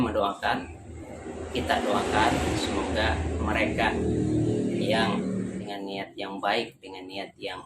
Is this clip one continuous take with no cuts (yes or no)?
no